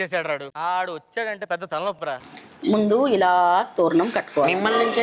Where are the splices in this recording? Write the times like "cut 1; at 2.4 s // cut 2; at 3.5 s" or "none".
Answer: cut 1; at 2.1 s